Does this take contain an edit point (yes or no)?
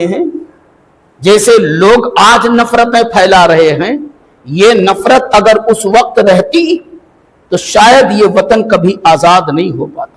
no